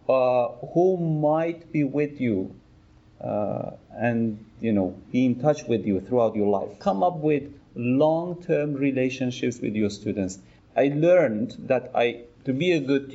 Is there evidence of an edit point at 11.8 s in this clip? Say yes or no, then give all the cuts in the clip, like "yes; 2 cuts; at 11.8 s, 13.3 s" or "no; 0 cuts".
no; 2 cuts; at 6.7 s, 10.5 s